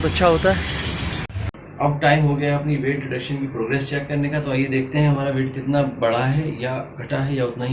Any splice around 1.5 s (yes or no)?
yes